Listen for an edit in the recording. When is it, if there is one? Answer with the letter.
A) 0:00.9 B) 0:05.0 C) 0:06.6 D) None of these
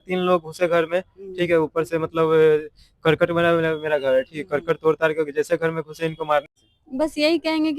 C